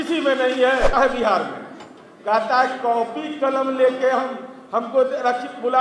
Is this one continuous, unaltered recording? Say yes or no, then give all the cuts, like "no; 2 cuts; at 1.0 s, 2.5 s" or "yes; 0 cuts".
no; 1 cut; at 0.9 s